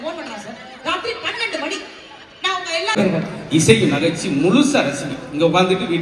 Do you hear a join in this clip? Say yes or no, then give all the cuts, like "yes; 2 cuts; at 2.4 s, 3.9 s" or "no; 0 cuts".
yes; 1 cut; at 3.0 s